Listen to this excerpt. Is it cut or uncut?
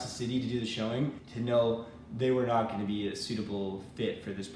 cut